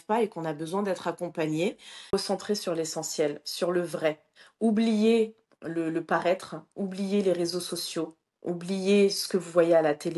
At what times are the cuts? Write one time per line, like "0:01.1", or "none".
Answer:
0:02.1

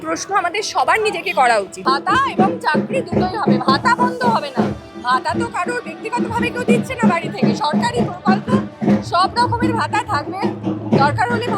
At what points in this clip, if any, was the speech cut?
0:01.7

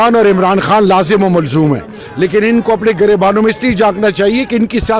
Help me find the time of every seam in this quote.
0:02.0

